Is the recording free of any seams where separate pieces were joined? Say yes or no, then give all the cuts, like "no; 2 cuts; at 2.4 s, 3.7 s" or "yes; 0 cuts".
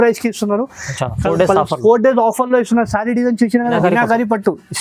no; 1 cut; at 3.8 s